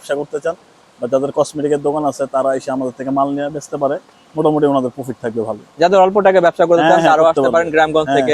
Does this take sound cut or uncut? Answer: uncut